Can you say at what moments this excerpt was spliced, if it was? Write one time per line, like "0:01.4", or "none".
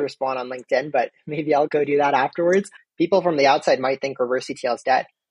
0:02.8